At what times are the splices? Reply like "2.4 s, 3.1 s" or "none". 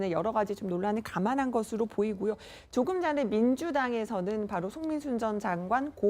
2.9 s